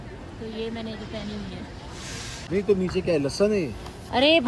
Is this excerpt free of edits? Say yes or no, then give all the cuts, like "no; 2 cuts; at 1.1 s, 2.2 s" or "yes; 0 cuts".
no; 1 cut; at 2.4 s